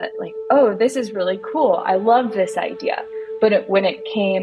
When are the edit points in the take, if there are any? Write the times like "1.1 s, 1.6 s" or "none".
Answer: none